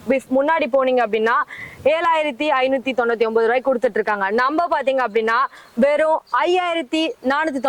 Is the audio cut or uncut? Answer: uncut